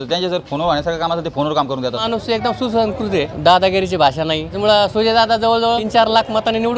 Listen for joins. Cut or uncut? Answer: cut